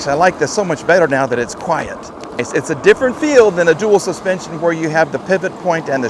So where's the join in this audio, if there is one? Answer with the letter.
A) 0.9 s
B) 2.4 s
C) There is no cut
B